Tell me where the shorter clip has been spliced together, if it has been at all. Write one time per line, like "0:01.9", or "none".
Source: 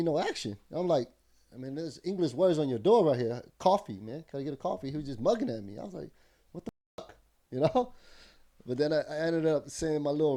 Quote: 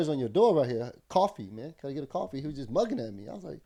none